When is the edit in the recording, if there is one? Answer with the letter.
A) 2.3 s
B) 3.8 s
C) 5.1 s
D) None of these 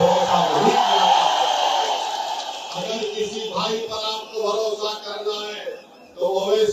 D